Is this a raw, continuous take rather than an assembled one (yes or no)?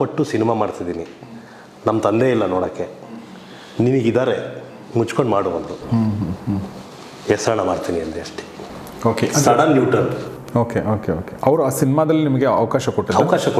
yes